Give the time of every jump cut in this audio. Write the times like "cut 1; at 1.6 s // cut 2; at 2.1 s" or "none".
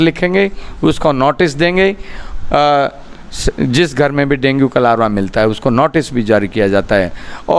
none